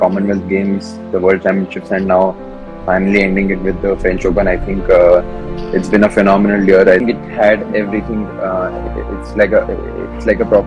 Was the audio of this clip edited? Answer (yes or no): yes